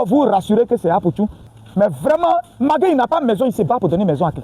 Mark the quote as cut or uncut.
cut